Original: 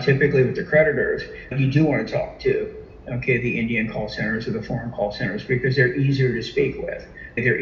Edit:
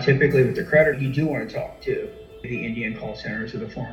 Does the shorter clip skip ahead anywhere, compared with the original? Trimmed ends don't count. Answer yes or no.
yes